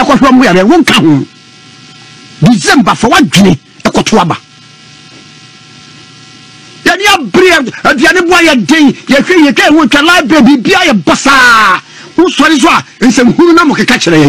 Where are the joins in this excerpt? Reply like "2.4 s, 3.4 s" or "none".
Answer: none